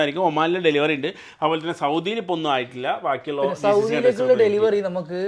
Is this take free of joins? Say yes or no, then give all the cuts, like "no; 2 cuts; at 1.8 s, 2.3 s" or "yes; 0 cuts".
yes; 0 cuts